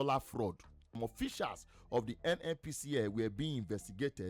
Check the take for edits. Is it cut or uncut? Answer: cut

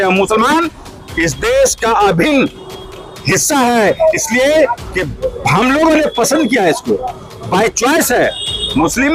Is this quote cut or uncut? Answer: uncut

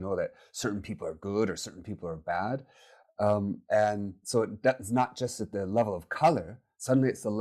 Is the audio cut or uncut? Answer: uncut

